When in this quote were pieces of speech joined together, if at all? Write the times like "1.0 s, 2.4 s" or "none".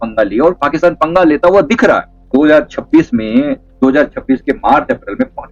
none